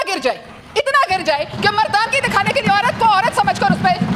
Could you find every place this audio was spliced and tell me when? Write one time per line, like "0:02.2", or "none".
none